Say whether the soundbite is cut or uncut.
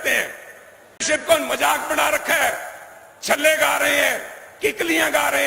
cut